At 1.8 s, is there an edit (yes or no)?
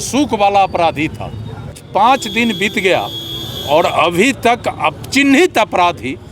yes